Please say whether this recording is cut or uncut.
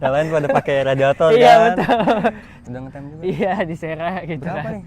cut